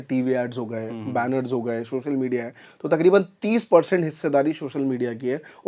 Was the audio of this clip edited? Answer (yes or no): no